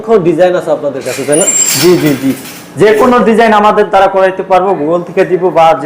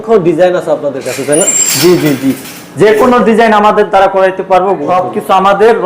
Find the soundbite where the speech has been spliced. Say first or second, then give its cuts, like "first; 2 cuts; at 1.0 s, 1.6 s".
second; 1 cut; at 4.8 s